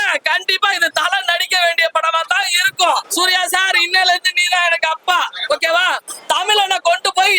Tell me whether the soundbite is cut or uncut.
cut